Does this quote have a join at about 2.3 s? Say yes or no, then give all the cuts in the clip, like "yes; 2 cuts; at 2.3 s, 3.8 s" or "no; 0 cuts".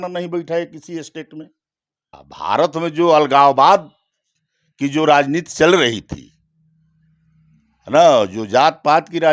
yes; 1 cut; at 2.3 s